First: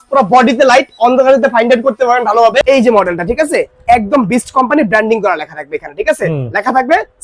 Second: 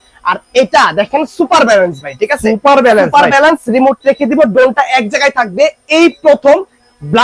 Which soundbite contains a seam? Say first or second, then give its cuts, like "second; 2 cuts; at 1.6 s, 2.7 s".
first; 1 cut; at 2.6 s